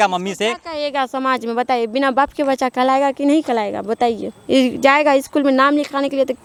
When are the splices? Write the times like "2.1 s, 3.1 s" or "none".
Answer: none